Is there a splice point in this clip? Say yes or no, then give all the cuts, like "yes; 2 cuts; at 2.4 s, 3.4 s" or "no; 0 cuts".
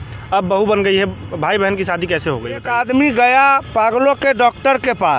yes; 1 cut; at 2.7 s